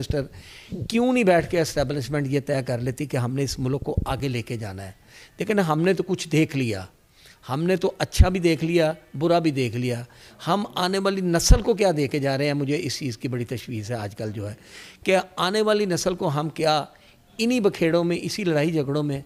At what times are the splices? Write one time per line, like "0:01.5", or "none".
none